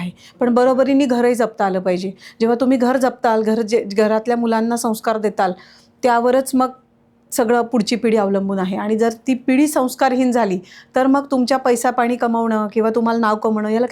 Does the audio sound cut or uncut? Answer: uncut